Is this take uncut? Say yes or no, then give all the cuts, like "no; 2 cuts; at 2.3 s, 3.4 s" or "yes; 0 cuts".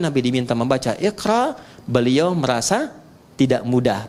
yes; 0 cuts